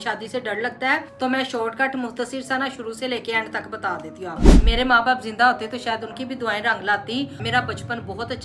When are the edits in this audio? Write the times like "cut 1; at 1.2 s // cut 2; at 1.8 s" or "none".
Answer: cut 1; at 1.1 s // cut 2; at 4.6 s // cut 3; at 7.4 s